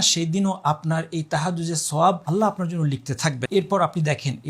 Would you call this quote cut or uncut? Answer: cut